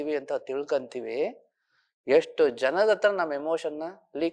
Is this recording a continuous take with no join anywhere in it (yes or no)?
yes